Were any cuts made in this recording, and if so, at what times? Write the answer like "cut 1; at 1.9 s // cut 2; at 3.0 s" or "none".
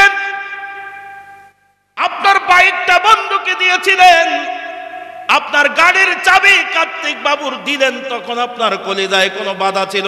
none